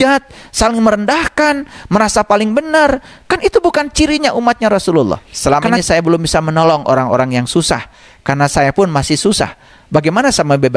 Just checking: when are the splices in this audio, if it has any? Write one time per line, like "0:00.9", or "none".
0:05.3